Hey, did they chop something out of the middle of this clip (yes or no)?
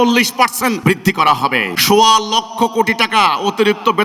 yes